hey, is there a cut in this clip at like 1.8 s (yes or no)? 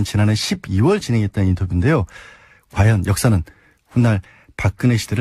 no